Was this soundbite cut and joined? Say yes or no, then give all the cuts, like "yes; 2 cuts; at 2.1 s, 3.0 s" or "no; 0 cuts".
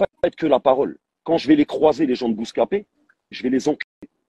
no; 0 cuts